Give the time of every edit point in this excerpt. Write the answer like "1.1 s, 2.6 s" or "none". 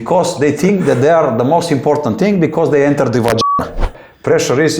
3.9 s